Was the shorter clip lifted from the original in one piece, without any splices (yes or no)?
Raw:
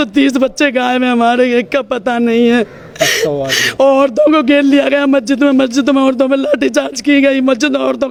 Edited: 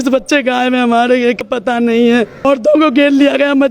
no